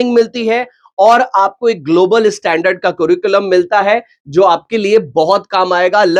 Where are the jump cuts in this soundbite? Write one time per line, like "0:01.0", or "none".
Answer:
none